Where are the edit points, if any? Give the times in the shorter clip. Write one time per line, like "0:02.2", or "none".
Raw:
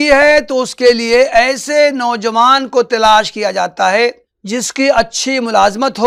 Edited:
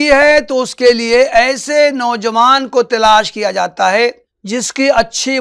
none